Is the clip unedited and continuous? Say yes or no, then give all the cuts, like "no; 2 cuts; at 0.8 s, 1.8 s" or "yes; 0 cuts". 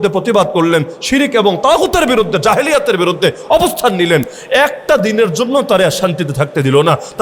yes; 0 cuts